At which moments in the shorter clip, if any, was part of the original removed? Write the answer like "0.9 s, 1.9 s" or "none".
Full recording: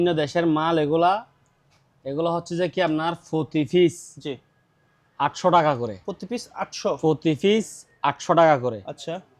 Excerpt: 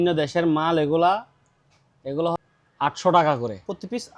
2.4 s